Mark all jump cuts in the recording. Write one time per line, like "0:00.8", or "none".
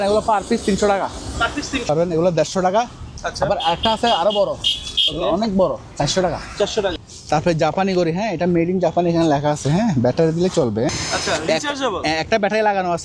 0:01.9
0:07.1
0:10.9